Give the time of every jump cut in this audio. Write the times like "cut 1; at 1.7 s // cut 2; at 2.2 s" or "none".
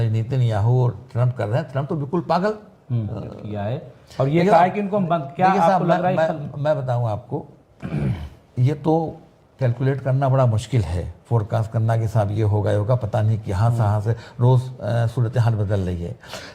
cut 1; at 3.4 s